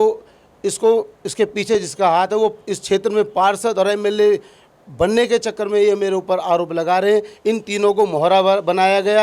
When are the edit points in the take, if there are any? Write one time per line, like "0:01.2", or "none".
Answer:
none